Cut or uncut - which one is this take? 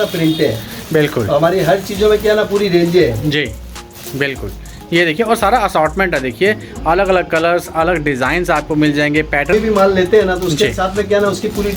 cut